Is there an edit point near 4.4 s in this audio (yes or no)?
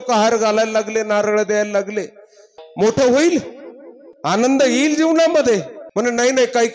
yes